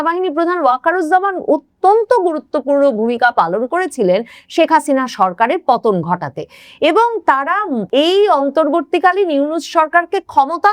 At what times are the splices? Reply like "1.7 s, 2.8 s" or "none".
none